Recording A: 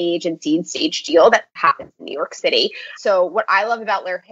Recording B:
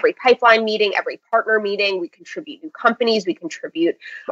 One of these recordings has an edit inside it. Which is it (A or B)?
A